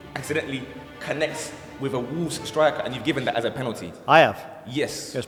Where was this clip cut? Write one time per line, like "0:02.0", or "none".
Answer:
none